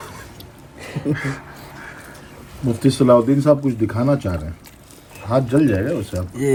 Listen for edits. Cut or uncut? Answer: uncut